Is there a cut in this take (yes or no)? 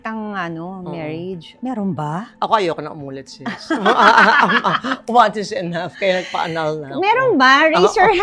no